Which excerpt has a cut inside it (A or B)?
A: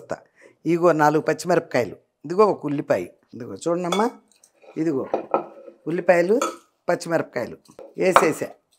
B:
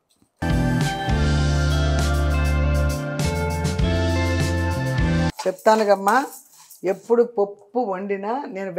A